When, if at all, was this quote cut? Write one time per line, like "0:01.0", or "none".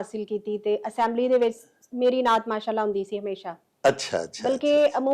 none